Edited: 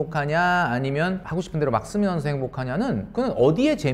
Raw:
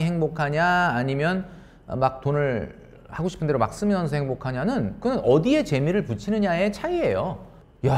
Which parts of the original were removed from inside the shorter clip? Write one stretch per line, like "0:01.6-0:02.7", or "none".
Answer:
0:01.5-0:03.1